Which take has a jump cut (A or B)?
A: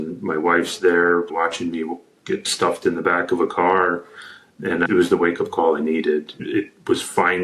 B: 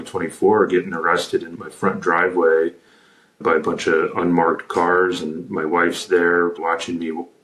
A